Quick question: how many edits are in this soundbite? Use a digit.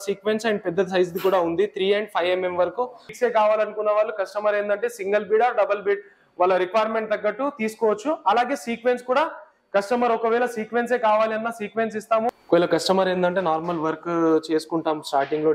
2